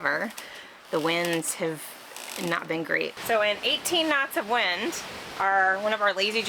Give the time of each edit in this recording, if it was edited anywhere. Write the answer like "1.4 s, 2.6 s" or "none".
3.1 s

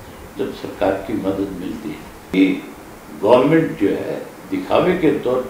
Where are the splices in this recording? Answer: 2.1 s

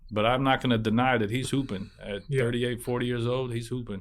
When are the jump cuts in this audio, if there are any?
none

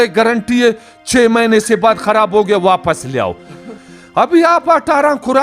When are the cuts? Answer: 3.8 s

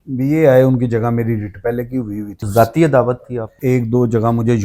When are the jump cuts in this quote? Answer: 2.4 s, 3.5 s

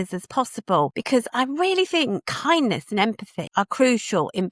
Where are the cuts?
1.0 s, 2.3 s, 3.3 s

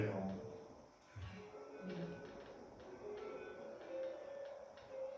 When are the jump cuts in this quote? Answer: none

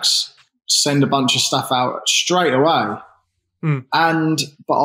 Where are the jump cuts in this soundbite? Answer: none

